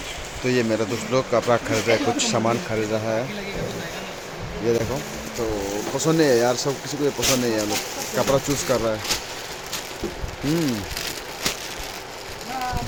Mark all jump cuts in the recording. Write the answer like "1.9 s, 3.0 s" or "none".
none